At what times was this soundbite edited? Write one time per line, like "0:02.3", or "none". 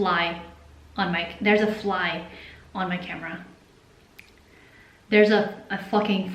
none